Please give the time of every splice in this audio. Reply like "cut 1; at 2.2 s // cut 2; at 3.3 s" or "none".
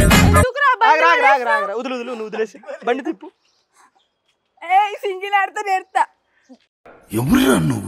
none